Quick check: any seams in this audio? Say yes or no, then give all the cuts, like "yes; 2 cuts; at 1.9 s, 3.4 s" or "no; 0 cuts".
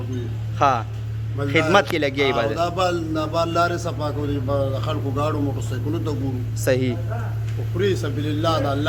no; 0 cuts